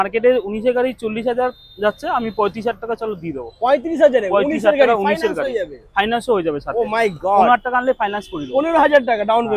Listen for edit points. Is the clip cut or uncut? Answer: uncut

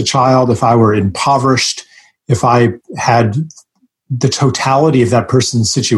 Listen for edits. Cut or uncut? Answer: uncut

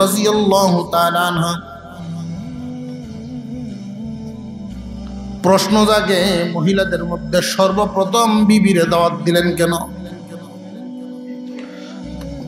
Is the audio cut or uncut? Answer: cut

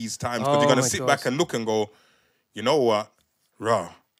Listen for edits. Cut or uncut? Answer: uncut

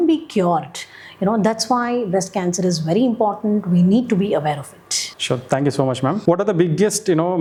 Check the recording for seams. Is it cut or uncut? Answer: uncut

